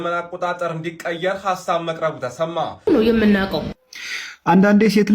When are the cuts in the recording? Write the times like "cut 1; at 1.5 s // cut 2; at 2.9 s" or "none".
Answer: cut 1; at 2.9 s

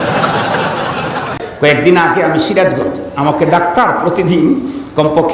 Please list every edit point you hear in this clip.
cut 1; at 1.4 s

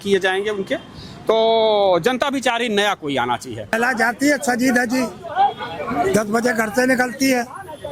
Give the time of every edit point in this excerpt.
cut 1; at 3.7 s

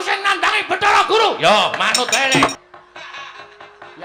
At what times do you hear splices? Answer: cut 1; at 2.6 s

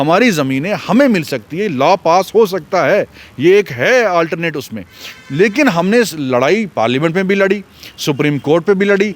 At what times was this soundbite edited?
none

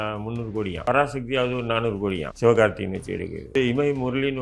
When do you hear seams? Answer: cut 1; at 0.9 s // cut 2; at 2.3 s // cut 3; at 3.5 s

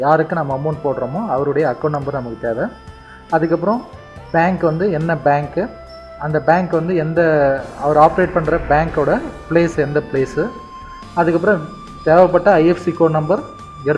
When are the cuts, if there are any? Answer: cut 1; at 4.7 s

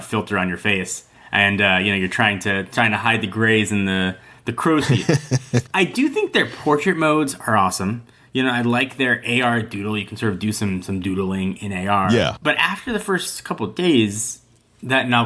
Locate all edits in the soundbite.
cut 1; at 5.7 s // cut 2; at 12.4 s

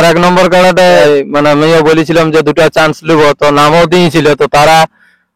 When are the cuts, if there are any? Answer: cut 1; at 1.0 s

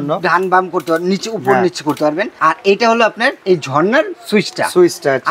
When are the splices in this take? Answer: cut 1; at 2.3 s // cut 2; at 3.4 s

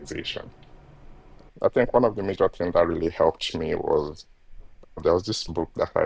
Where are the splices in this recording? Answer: cut 1; at 1.4 s

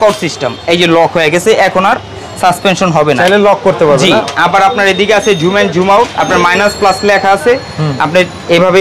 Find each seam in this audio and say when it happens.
none

